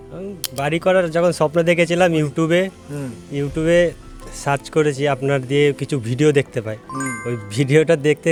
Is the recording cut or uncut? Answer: uncut